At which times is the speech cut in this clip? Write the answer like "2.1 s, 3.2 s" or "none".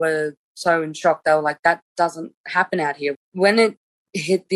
3.2 s